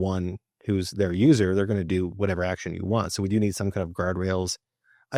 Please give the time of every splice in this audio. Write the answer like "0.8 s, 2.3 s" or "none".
none